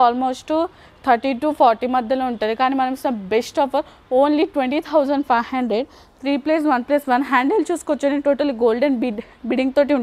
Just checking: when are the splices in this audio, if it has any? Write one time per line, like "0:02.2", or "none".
none